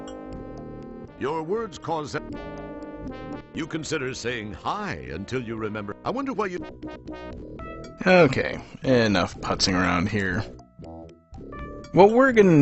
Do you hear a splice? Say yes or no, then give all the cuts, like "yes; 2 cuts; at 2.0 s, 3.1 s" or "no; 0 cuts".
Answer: no; 0 cuts